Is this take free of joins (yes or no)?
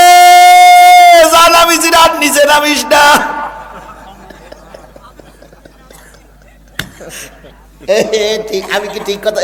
yes